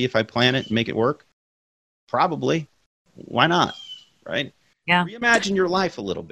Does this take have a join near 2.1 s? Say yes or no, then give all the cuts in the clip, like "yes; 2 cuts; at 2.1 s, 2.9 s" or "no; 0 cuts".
no; 0 cuts